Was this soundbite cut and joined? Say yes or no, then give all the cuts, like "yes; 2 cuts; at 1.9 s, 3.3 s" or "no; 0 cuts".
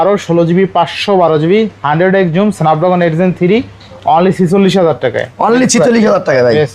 no; 0 cuts